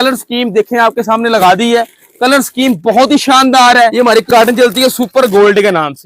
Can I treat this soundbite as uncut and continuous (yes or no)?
no